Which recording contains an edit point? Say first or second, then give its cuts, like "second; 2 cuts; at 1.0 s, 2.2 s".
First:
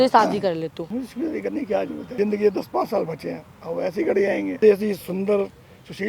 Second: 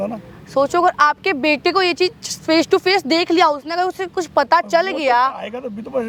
first; 3 cuts; at 0.8 s, 2.0 s, 4.6 s